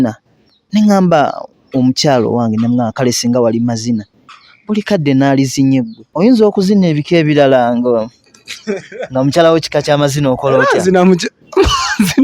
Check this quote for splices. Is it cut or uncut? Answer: cut